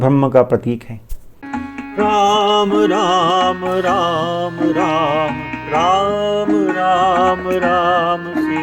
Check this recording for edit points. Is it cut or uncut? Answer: cut